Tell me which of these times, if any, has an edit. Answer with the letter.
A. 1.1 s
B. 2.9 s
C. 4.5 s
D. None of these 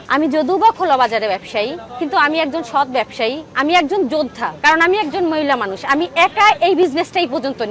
C